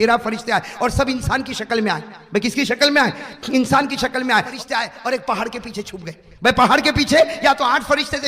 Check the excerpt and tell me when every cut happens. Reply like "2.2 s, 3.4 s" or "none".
4.5 s

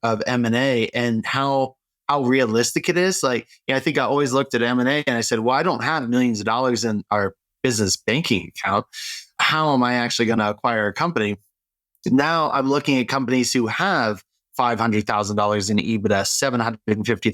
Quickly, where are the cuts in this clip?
9.4 s

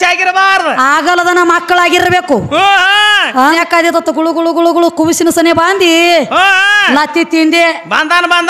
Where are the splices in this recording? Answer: 3.6 s

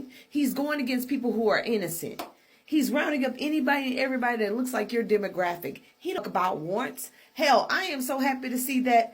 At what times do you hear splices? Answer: 6.2 s

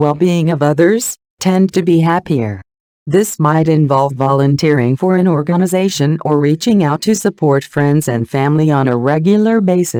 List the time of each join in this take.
none

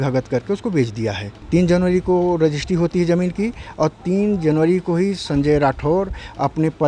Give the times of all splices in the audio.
1.3 s

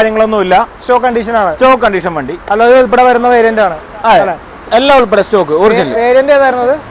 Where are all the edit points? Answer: none

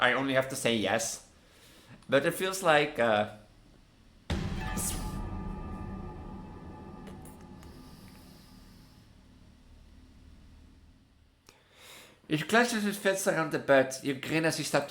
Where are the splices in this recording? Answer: 11.2 s

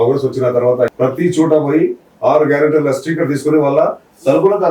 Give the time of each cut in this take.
0.9 s

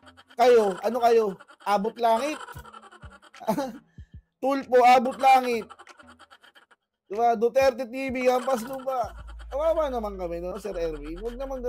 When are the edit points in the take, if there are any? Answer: 10.5 s

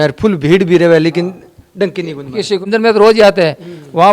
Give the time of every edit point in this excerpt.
2.6 s

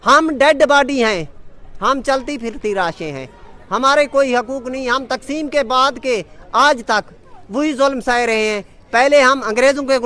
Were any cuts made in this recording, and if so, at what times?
none

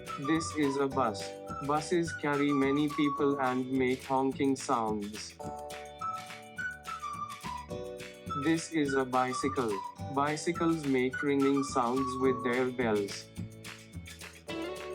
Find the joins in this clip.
5.2 s, 7.7 s, 13.1 s

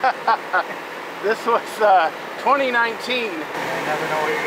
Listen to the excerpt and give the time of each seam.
none

